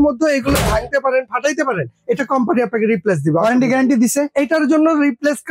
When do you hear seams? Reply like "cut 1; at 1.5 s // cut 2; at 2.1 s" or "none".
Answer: none